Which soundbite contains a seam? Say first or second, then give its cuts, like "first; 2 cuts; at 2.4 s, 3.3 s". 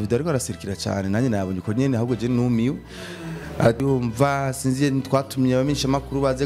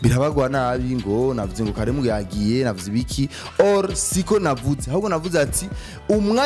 first; 1 cut; at 3.8 s